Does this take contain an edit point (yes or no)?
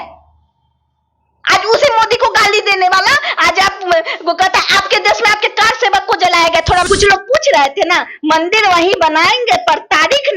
yes